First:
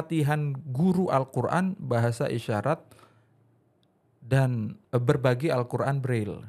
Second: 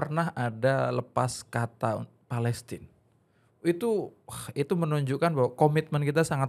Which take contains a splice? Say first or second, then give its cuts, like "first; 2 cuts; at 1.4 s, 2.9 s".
first; 1 cut; at 4.8 s